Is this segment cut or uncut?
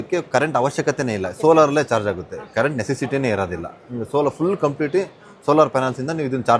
uncut